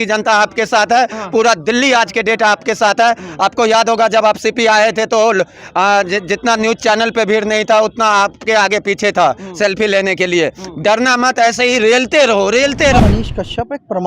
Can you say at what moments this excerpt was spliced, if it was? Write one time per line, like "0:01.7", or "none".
0:13.0